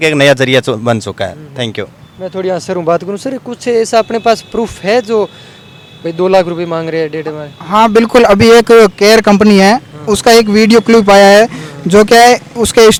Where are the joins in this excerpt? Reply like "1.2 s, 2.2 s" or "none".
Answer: none